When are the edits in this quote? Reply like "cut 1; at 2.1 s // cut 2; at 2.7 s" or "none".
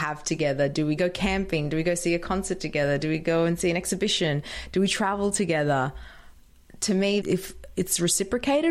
cut 1; at 1.0 s